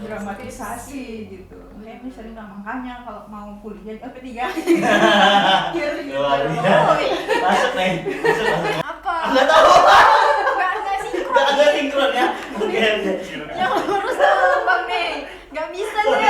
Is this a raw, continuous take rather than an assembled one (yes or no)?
no